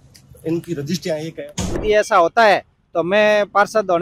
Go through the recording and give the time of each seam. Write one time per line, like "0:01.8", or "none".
0:01.8